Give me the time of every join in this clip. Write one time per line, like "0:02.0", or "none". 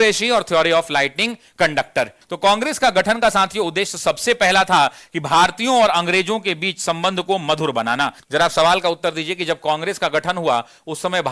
0:02.2
0:08.2